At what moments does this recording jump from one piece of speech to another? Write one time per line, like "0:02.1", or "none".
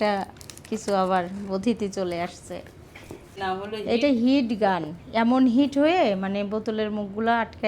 0:03.4

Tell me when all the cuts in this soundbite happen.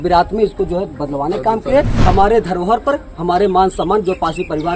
0:02.0

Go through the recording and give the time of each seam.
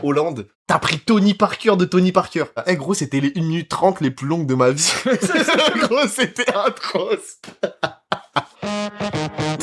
0:02.6
0:08.5

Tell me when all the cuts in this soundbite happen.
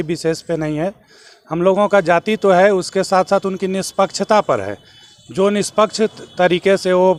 none

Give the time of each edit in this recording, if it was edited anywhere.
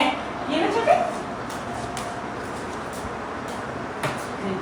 none

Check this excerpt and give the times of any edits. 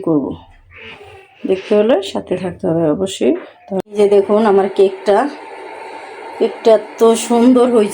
0:03.8

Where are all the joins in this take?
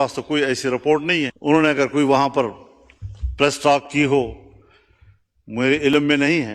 0:01.3

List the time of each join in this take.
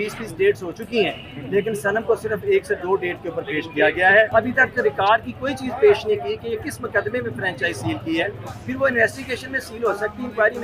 0:04.3

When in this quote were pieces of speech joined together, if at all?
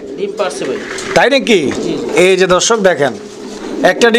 none

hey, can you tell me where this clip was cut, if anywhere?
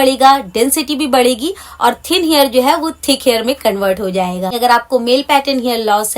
0:04.5

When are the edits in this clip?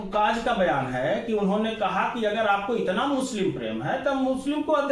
none

